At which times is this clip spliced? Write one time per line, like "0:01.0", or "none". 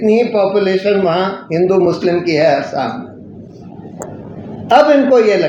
none